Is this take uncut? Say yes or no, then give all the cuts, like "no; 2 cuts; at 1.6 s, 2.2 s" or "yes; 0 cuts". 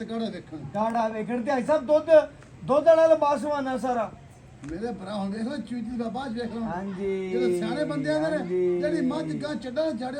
yes; 0 cuts